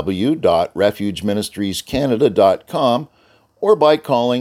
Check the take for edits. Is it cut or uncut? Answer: uncut